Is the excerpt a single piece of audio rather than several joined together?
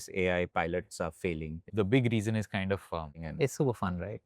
no; 2 cuts; at 1.7 s, 3.3 s

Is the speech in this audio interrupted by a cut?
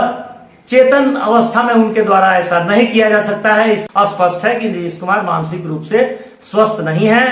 yes; 1 cut; at 3.8 s

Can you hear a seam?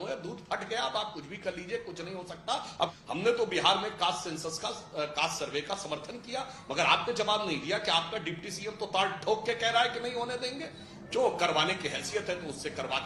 no; 0 cuts

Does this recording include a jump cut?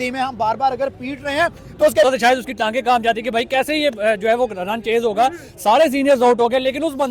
yes; 1 cut; at 2.0 s

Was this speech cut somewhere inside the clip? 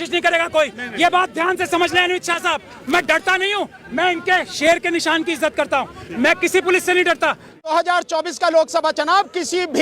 yes; 1 cut; at 7.7 s

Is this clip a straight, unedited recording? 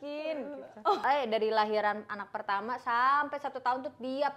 no; 1 cut; at 1.0 s

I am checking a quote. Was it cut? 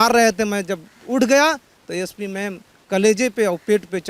no; 0 cuts

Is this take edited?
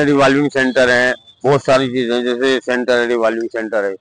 no; 0 cuts

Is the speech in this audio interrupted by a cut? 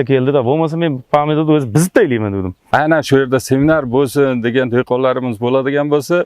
yes; 1 cut; at 2.6 s

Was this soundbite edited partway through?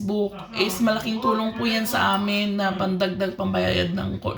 no; 0 cuts

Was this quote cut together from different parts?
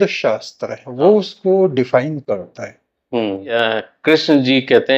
yes; 1 cut; at 3.5 s

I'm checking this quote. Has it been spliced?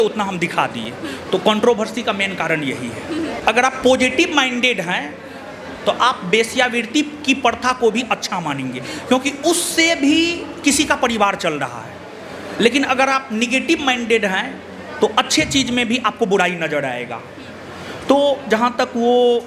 no; 0 cuts

